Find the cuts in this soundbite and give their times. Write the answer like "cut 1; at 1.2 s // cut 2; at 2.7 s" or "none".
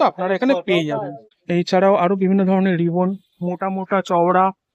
cut 1; at 1.4 s